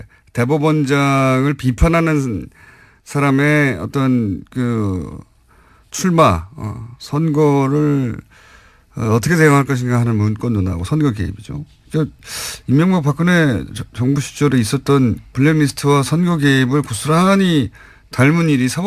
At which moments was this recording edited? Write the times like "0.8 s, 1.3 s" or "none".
14.3 s